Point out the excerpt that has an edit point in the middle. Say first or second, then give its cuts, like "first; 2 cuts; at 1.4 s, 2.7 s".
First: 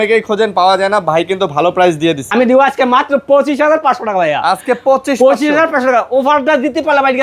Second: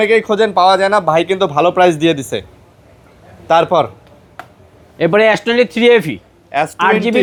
first; 1 cut; at 2.2 s